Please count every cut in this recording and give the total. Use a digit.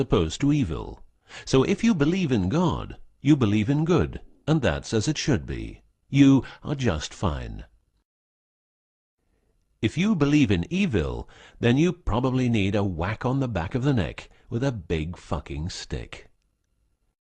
1